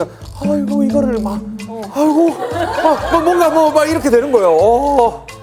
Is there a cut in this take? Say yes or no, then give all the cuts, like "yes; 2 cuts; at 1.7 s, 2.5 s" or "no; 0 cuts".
no; 0 cuts